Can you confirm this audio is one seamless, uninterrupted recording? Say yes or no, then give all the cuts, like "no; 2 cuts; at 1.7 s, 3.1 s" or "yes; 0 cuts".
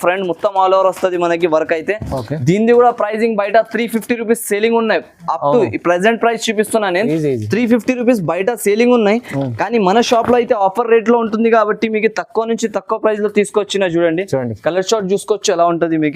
yes; 0 cuts